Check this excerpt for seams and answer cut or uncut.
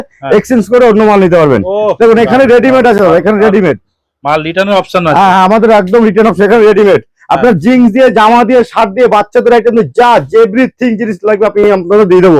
uncut